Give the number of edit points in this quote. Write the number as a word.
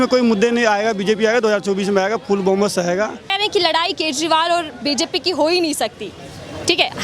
one